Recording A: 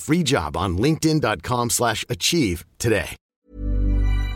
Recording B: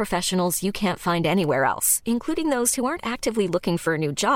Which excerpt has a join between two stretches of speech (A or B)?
A